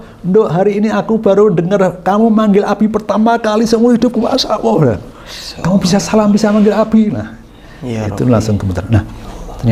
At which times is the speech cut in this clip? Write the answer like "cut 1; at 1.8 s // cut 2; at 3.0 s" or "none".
none